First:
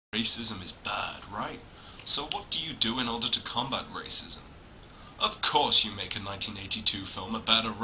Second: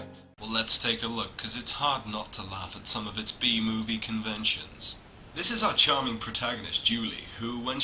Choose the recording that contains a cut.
second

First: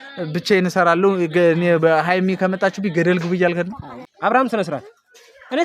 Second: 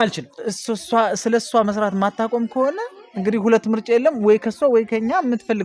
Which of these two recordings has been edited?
first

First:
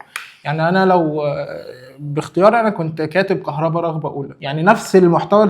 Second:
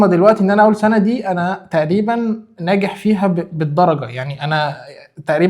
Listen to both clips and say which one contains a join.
first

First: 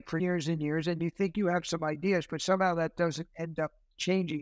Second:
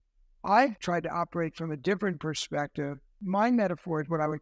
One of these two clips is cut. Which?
second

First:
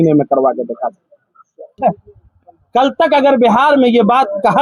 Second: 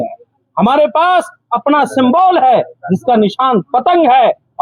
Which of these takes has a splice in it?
first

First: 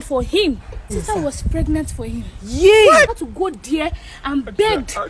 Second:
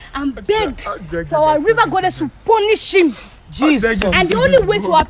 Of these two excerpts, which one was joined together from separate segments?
first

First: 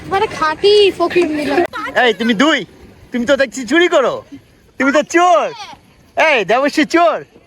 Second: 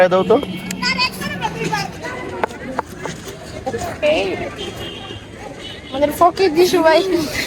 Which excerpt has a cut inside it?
first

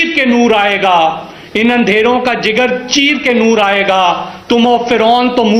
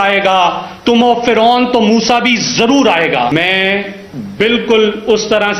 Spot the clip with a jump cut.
second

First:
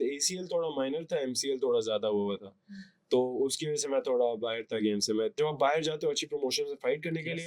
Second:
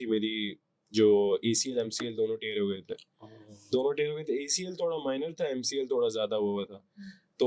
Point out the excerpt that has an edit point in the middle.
first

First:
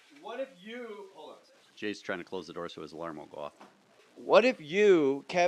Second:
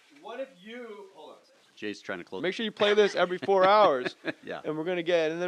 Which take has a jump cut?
first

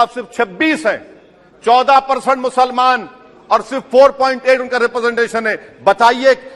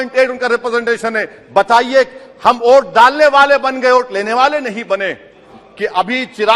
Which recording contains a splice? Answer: second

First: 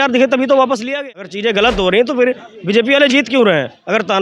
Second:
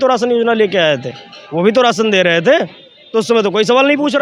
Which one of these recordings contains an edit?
first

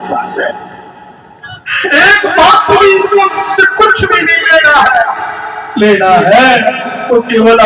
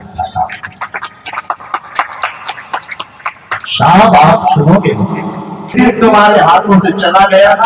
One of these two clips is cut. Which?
second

